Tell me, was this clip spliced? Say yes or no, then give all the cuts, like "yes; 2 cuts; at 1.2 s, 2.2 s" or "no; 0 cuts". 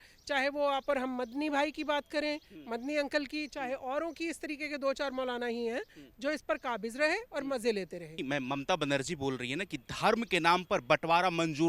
yes; 1 cut; at 8.2 s